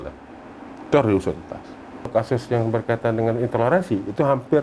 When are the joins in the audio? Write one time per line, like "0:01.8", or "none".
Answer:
0:02.1